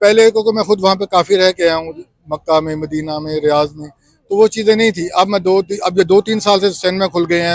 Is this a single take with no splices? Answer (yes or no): yes